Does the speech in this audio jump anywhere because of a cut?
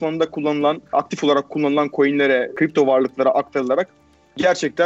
yes; 2 cuts; at 0.9 s, 2.5 s

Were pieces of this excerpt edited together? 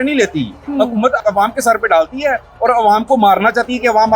yes; 1 cut; at 1.2 s

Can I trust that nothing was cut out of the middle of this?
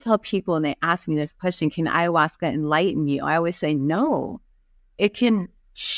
yes; 0 cuts

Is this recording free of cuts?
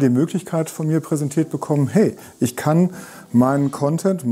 yes; 0 cuts

